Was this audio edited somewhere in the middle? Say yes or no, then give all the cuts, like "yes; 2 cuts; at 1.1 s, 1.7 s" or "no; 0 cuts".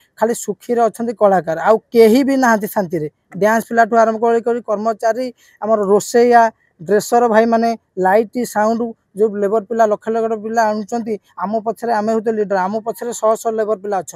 no; 0 cuts